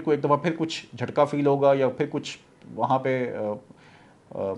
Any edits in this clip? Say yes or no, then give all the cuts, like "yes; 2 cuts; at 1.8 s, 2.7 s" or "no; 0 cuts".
no; 0 cuts